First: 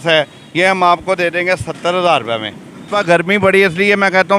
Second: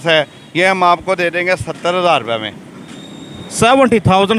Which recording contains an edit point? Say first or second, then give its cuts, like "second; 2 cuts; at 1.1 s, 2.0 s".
first; 1 cut; at 2.9 s